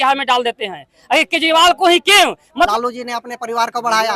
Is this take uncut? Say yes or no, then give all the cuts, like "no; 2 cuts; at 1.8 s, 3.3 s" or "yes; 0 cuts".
no; 1 cut; at 2.7 s